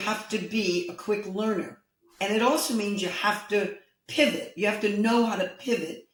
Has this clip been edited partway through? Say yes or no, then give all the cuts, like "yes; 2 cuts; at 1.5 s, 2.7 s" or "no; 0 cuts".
no; 0 cuts